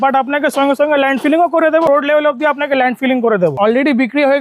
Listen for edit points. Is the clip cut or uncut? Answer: cut